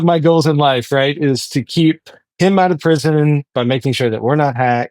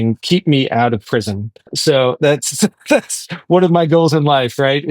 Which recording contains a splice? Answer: second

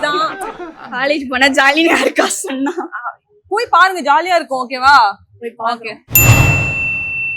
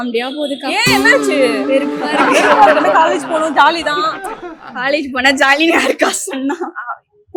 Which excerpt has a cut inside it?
first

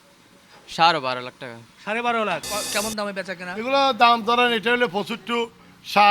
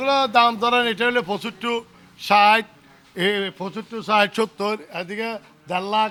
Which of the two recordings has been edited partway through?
first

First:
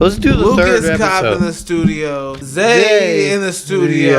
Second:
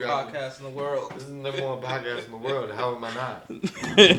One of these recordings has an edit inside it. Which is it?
first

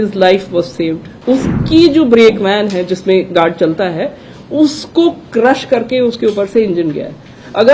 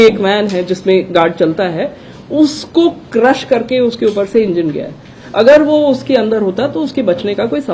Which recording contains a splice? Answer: first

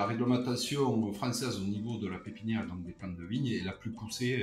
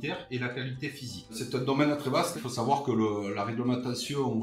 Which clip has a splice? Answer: second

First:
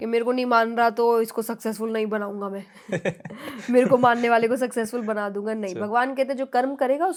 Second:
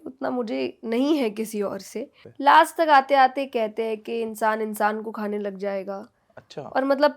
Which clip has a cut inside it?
second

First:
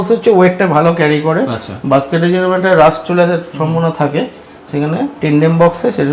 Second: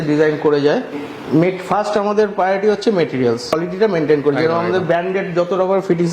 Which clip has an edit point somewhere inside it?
second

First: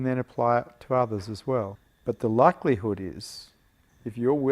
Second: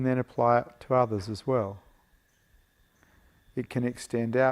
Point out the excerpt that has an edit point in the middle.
first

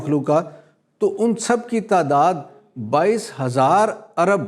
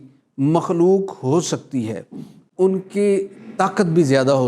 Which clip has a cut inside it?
second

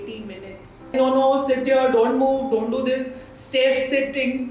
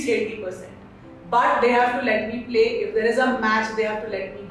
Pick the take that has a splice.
first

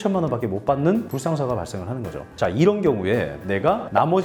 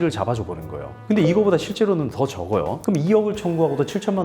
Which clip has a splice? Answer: second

